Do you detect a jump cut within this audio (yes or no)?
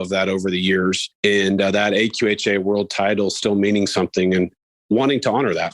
yes